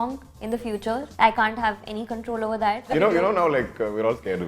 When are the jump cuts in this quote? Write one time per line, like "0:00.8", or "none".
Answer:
0:02.8